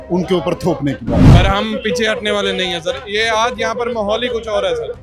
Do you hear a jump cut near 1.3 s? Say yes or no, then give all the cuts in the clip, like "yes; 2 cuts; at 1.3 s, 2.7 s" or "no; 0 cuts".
yes; 1 cut; at 1.3 s